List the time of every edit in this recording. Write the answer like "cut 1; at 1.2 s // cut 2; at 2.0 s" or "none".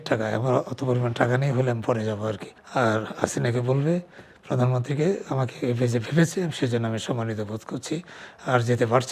cut 1; at 2.5 s